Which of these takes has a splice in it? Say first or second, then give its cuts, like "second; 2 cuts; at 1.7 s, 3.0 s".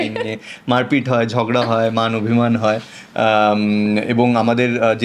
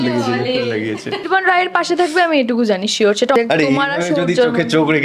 second; 2 cuts; at 1.2 s, 3.4 s